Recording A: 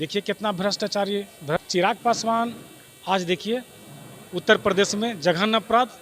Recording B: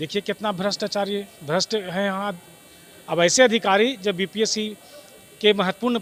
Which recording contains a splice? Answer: A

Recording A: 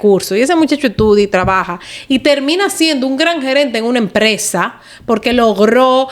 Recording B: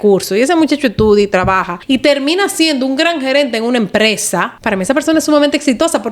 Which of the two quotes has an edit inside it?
B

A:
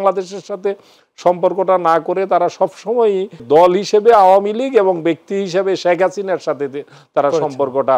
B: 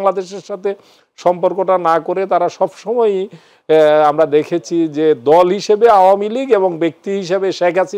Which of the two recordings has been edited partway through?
A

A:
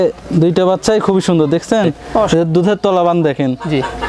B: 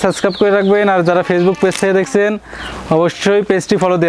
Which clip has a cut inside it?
A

